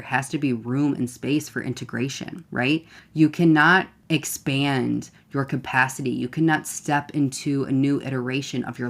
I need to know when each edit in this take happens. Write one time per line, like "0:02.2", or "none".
0:02.7
0:04.0